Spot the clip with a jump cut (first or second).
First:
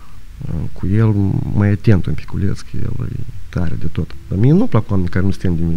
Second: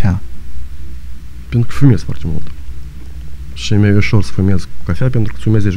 first